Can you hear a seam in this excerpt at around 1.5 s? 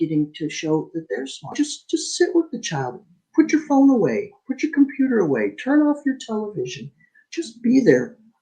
yes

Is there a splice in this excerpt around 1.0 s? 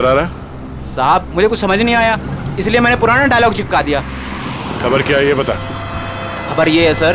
no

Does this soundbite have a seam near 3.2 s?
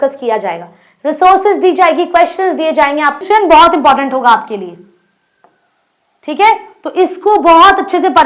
yes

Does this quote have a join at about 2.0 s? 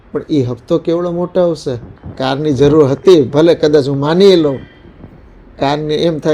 yes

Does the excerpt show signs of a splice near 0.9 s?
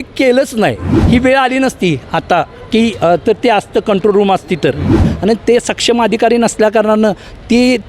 yes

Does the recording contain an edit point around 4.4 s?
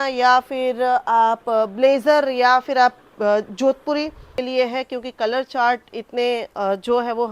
yes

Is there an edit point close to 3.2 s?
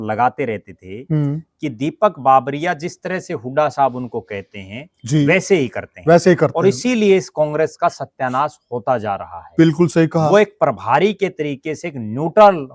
no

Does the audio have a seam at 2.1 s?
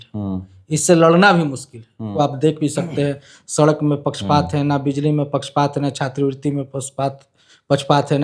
yes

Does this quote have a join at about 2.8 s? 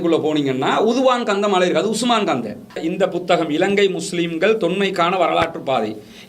yes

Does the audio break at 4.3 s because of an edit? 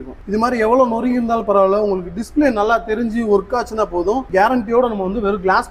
yes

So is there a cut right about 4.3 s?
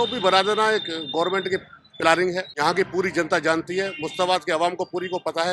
no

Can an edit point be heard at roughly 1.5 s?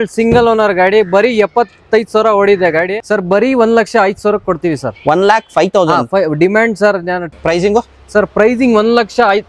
no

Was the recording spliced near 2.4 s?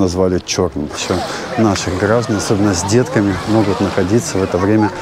no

